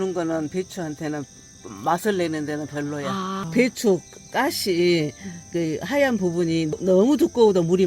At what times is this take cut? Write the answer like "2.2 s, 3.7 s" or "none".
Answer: 3.4 s

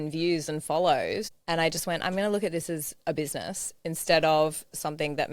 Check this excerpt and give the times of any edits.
1.3 s

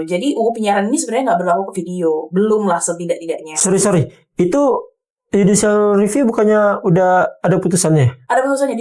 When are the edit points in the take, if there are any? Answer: none

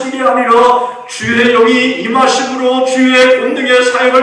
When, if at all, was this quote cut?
none

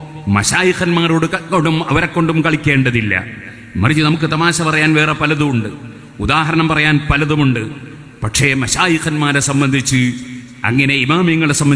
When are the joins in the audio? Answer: none

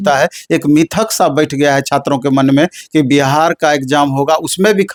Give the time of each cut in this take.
none

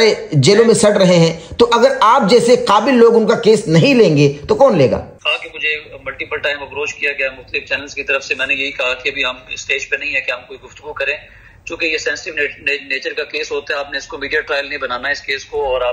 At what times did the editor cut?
5.1 s

